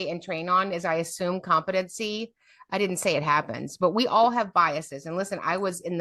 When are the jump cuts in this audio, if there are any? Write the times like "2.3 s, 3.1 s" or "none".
none